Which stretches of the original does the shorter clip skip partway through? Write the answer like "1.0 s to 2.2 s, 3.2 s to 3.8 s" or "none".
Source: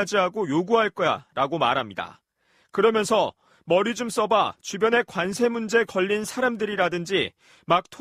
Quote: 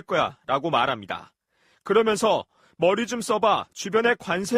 none